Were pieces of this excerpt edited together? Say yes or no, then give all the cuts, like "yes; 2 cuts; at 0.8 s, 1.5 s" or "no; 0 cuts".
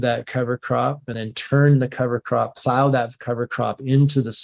yes; 1 cut; at 1.1 s